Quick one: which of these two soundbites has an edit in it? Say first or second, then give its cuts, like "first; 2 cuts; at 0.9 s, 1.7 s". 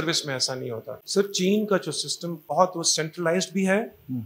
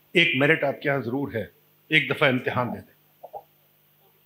first; 2 cuts; at 0.9 s, 2.5 s